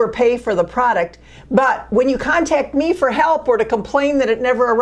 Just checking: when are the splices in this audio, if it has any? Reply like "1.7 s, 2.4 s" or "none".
none